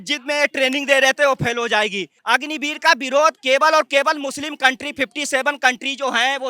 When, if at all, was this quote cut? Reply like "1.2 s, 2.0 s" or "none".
2.1 s